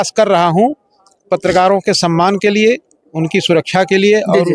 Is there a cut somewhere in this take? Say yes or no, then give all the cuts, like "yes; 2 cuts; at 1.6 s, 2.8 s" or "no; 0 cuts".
no; 0 cuts